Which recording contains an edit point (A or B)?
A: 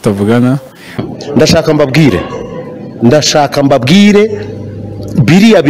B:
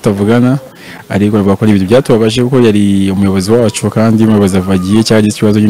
A